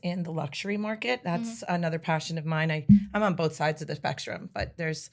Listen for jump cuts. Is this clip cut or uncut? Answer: uncut